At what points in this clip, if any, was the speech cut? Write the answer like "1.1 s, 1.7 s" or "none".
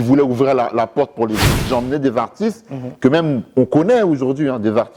1.7 s